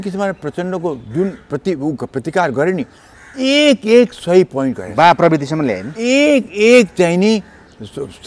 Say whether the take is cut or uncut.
uncut